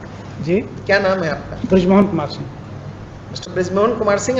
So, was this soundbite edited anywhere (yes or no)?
no